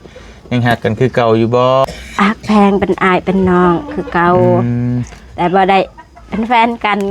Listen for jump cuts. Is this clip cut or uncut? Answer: cut